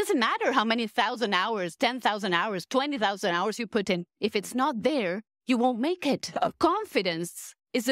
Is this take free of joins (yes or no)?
no